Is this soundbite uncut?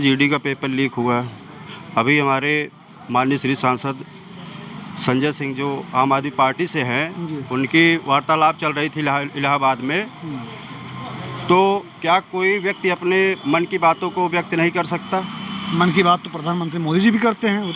yes; 0 cuts

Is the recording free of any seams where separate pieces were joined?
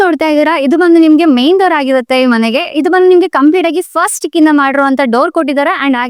yes; 0 cuts

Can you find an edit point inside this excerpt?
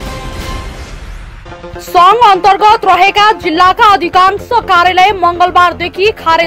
no; 0 cuts

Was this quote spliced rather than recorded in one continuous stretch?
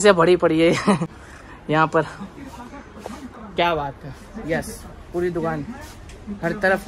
no; 0 cuts

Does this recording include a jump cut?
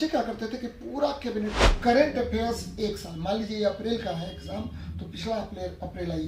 yes; 1 cut; at 1.7 s

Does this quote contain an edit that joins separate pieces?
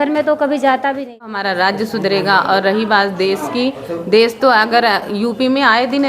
yes; 1 cut; at 1.4 s

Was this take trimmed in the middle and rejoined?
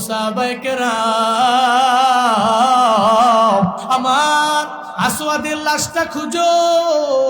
yes; 1 cut; at 3.8 s

